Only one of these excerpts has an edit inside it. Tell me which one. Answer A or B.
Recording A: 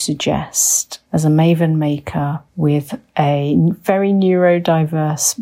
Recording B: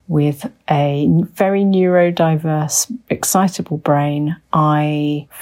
A